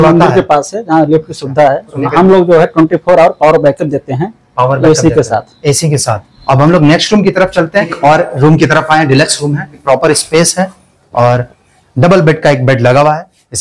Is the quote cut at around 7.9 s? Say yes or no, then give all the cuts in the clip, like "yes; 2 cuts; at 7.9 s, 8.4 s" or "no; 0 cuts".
yes; 4 cuts; at 2.0 s, 6.3 s, 7.9 s, 9.7 s